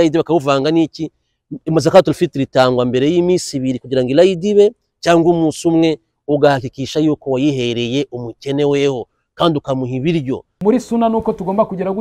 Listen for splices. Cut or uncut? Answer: cut